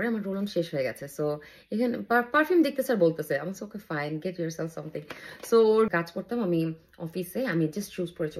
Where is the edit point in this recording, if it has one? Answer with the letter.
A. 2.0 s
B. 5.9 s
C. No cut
B